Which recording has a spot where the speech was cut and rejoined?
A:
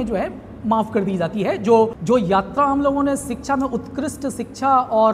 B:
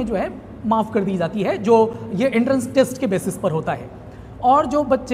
A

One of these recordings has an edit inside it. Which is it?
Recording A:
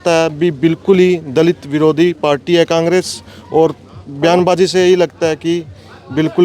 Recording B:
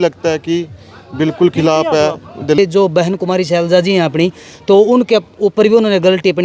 B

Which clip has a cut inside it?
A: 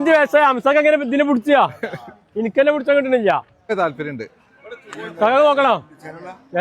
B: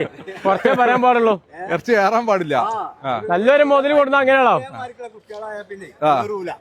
A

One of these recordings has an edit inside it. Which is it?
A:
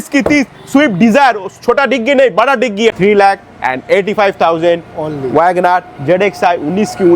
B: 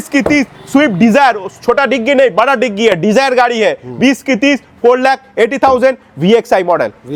A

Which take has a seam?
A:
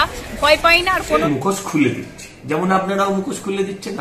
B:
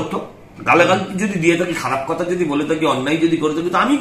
A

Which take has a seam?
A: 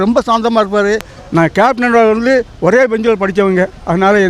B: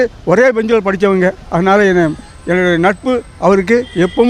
A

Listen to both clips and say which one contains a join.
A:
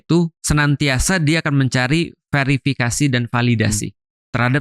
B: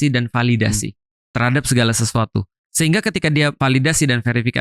B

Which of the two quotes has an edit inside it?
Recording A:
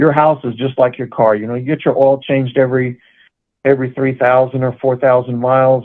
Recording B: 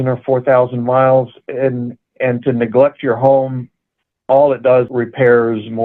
B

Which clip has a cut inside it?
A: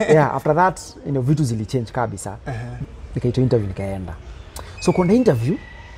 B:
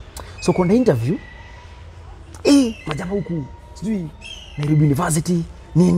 A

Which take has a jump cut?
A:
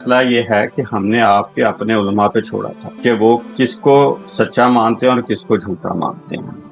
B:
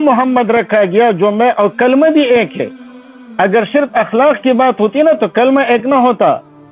A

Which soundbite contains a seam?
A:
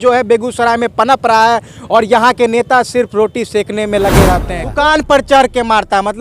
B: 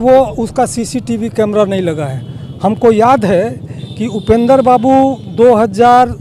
A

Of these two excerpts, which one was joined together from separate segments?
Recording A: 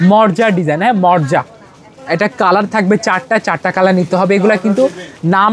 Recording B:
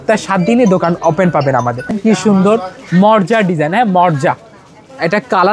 B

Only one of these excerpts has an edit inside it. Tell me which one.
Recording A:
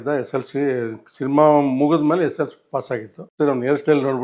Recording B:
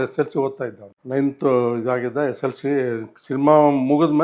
A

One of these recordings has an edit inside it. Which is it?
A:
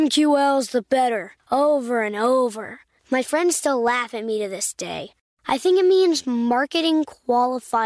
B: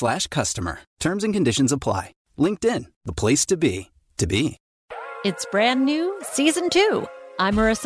B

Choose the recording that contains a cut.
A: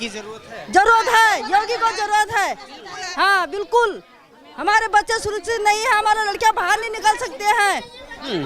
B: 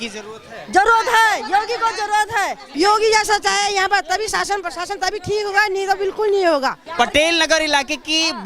B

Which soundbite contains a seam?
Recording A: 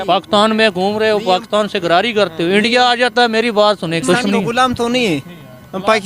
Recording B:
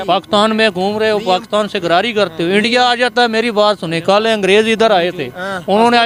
A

